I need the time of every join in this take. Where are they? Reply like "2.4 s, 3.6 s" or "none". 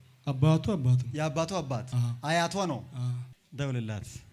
3.3 s